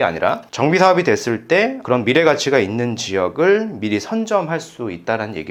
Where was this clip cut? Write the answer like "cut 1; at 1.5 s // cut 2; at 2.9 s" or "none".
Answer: none